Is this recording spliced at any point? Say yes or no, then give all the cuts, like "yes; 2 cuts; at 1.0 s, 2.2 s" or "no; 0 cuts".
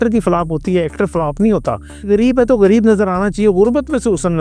yes; 1 cut; at 2.1 s